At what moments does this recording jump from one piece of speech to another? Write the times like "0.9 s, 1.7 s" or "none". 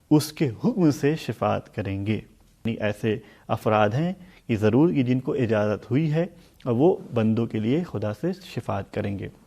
2.6 s